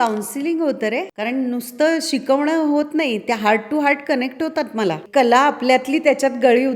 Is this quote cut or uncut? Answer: cut